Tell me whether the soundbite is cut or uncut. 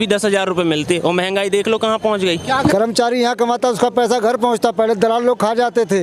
cut